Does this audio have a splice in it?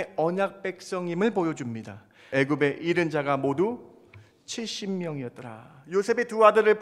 yes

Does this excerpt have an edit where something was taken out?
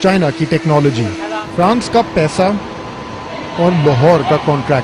yes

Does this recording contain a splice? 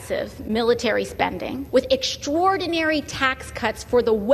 yes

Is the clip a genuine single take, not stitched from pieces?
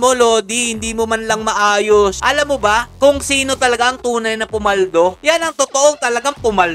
no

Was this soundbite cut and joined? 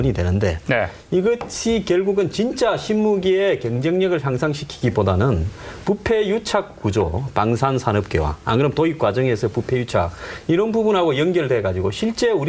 yes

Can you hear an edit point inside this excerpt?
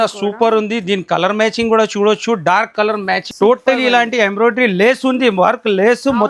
yes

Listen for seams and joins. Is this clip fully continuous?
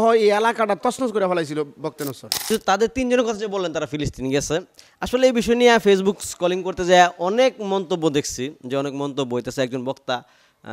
no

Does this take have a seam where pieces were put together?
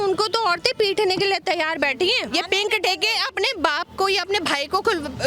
yes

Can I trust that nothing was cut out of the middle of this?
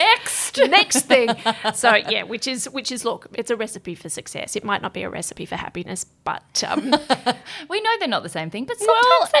yes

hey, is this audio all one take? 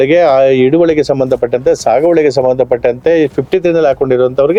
yes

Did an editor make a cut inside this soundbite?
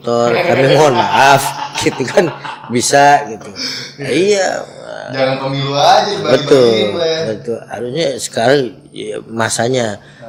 no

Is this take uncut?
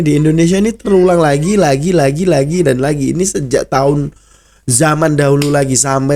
yes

